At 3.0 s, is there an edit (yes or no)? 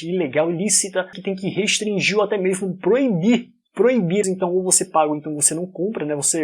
no